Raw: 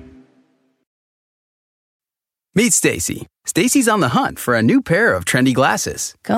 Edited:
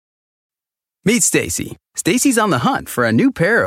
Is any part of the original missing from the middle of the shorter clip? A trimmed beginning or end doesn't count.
no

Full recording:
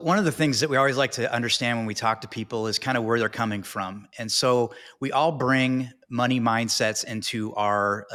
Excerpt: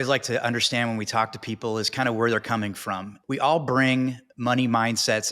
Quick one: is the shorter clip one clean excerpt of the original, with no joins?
no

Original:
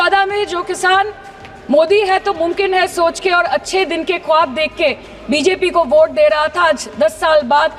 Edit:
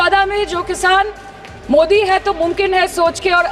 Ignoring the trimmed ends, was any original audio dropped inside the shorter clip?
no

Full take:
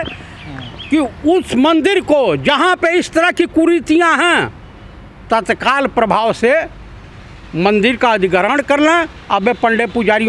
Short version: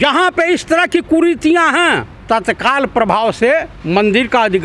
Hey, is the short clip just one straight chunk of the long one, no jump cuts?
no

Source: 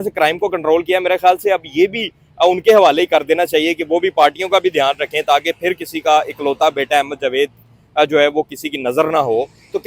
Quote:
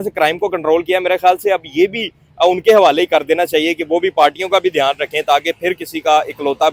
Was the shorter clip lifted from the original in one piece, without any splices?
yes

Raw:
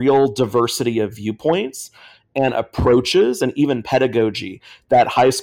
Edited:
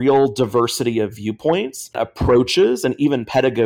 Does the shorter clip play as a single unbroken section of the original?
no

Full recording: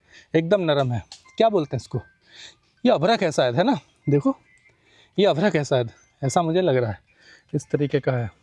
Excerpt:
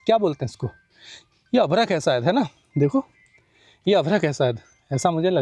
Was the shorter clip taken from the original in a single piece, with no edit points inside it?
yes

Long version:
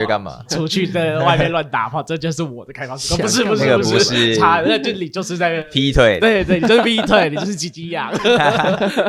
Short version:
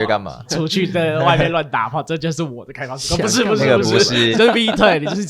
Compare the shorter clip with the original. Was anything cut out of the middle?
yes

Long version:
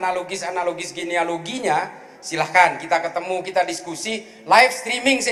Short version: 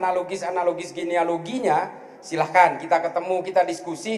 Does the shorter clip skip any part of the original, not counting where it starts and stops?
no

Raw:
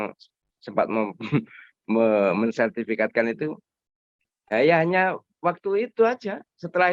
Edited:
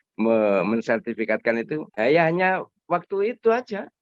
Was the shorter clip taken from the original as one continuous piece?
no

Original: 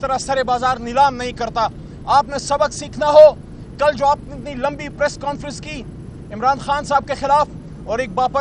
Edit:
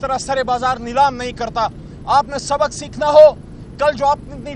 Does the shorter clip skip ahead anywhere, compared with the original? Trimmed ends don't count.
no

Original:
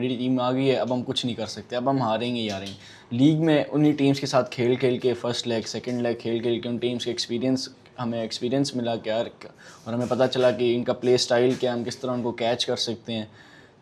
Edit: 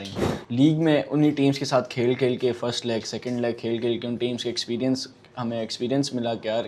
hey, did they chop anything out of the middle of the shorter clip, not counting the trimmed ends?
no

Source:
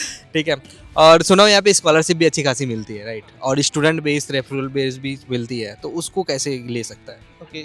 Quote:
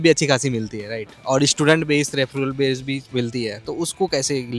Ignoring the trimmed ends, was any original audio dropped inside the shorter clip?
no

